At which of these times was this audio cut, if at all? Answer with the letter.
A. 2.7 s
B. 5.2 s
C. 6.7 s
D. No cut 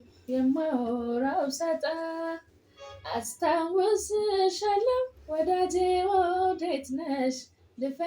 B